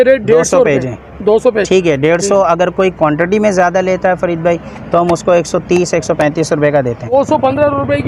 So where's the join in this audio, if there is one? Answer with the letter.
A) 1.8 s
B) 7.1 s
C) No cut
B